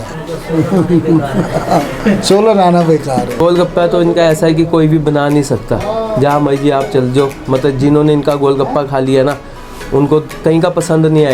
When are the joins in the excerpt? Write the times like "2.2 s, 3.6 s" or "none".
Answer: 3.4 s, 10.3 s